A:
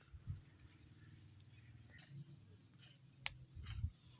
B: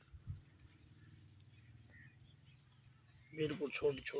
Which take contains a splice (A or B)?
A